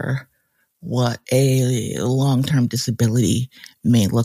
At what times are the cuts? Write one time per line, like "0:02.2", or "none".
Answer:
none

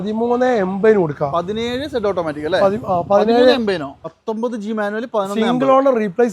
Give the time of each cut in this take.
0:04.0

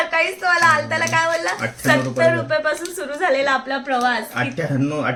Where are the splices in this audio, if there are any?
none

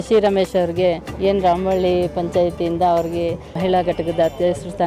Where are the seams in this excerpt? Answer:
0:01.1
0:03.6

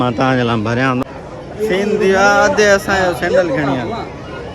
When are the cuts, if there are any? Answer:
0:01.0

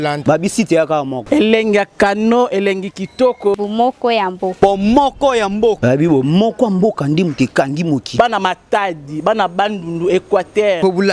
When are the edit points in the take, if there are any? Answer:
none

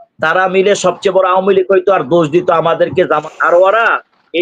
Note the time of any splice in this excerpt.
0:03.2

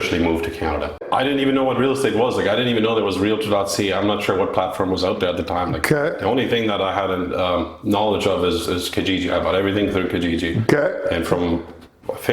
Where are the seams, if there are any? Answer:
0:01.0

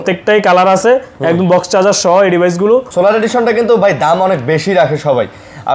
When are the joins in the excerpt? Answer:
0:02.9

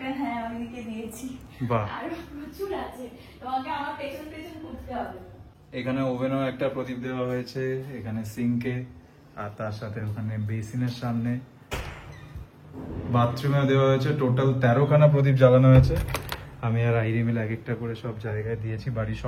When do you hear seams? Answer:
none

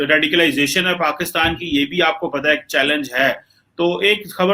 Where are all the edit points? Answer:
none

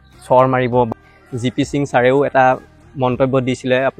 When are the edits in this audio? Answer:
0:00.9

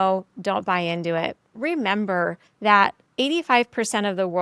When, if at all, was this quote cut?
0:01.4
0:02.8

